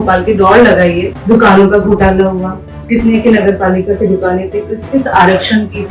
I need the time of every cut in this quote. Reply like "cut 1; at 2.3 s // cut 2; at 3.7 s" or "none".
cut 1; at 1.1 s